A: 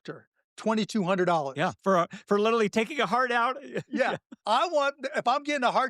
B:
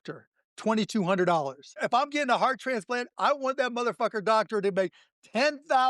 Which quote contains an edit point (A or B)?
B